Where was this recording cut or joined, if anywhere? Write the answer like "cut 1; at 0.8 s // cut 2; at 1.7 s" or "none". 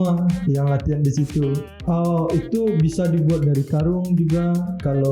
cut 1; at 1.7 s